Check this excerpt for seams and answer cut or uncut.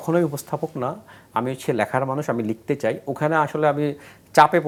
uncut